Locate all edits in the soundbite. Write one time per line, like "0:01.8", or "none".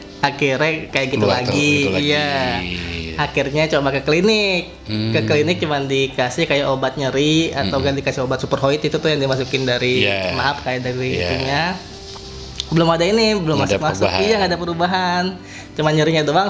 none